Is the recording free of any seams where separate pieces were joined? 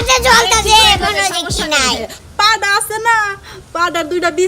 no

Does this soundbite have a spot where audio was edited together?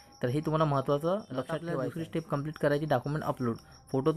yes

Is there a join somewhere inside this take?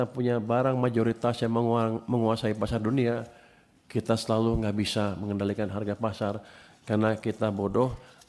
no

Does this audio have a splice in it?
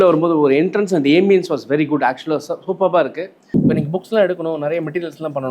yes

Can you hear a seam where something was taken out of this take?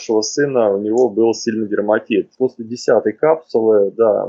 yes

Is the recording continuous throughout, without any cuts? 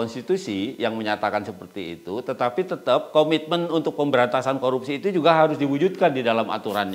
yes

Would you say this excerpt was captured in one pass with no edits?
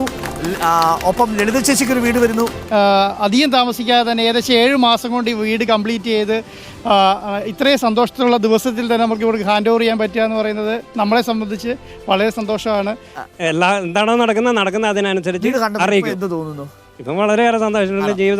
no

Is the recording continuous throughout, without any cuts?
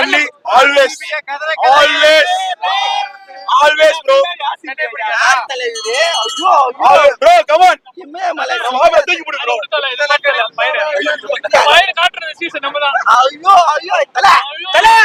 yes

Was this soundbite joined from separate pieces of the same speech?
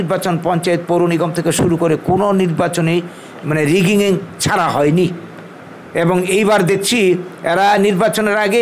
no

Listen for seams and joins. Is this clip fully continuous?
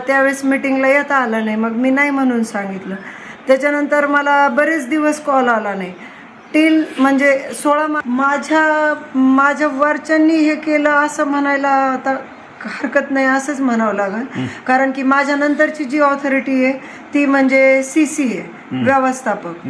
no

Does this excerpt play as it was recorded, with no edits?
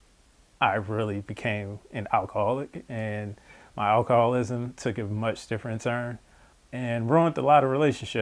yes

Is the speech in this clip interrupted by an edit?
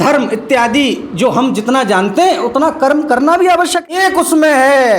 yes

